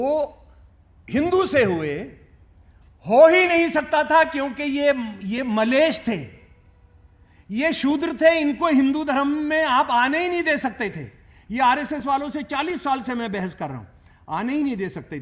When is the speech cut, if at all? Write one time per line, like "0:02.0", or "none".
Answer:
none